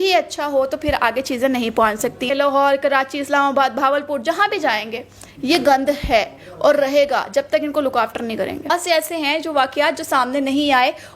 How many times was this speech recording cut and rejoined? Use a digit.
2